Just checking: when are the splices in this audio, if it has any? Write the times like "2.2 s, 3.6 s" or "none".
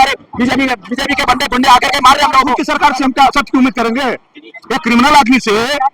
2.5 s